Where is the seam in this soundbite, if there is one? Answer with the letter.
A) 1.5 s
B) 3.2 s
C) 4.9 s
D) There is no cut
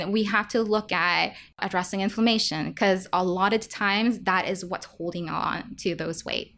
A